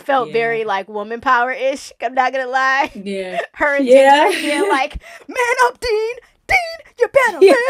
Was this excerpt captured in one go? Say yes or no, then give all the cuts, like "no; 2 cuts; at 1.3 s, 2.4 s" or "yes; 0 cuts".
yes; 0 cuts